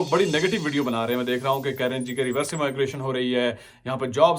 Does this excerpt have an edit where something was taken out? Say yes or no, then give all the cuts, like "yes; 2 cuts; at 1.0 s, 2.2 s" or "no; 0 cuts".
no; 0 cuts